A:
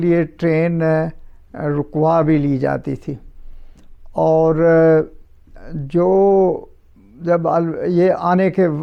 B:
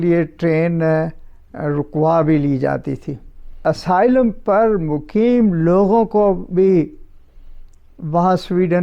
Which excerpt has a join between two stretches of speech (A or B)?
B